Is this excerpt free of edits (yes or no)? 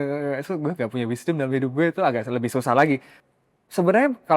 no